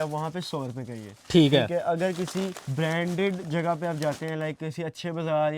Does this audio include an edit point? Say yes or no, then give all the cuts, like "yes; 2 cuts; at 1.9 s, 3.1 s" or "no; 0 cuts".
yes; 1 cut; at 2.6 s